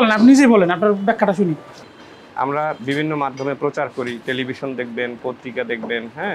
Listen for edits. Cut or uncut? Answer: cut